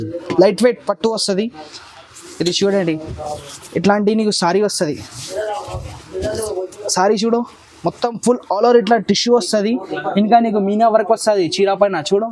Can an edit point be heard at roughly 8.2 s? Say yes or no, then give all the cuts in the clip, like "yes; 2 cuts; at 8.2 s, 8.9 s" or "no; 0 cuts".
no; 0 cuts